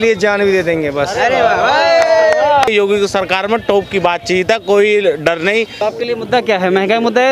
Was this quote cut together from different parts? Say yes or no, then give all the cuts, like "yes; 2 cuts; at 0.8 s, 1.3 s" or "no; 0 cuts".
yes; 2 cuts; at 2.7 s, 5.8 s